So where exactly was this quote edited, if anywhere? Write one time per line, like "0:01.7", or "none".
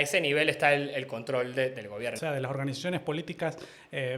0:02.2